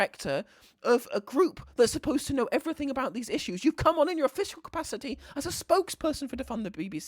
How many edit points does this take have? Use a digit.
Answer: 0